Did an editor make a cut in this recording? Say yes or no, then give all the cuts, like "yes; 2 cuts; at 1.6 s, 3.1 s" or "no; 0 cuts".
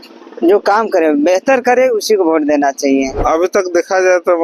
yes; 1 cut; at 3.2 s